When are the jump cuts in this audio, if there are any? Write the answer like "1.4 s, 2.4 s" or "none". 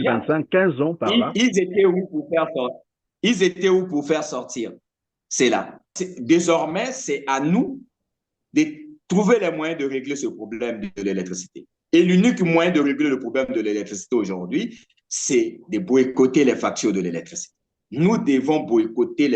6.0 s